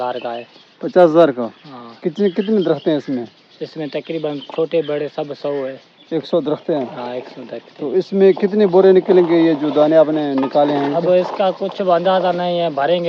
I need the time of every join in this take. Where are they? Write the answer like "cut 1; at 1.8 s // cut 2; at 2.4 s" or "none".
none